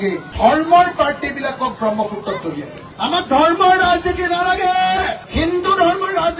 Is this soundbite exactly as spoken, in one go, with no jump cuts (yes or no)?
yes